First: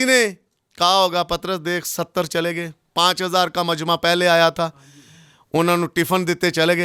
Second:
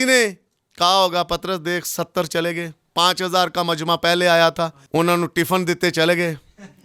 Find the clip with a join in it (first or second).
second